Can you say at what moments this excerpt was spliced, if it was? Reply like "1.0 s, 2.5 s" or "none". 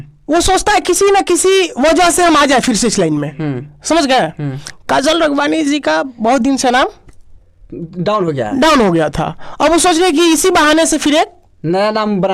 none